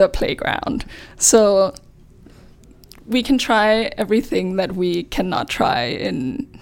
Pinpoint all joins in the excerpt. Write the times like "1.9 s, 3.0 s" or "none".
none